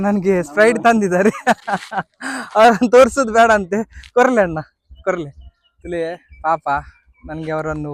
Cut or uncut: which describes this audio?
uncut